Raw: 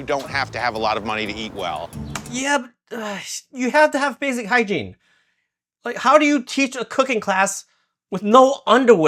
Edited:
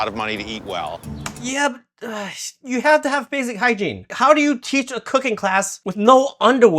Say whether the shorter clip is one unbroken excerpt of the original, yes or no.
no